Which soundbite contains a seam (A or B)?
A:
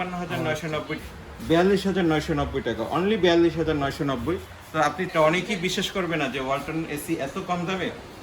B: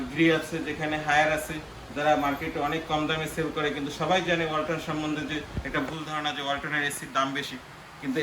A